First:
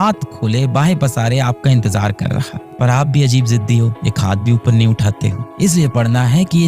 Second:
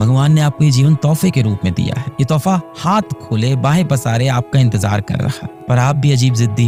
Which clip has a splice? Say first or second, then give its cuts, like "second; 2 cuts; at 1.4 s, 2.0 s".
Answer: first; 1 cut; at 5.4 s